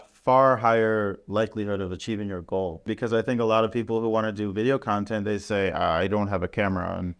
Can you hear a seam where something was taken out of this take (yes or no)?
yes